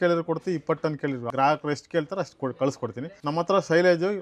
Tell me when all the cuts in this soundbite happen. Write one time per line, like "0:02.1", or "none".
0:01.2
0:03.1